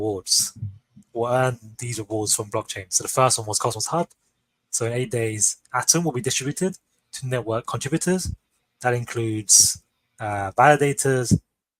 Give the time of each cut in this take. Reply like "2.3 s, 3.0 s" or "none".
none